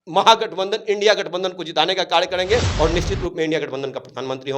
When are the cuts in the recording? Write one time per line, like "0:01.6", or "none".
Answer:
0:02.7